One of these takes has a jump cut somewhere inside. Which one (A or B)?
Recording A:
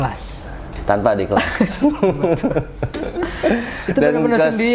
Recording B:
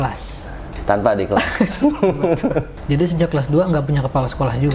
B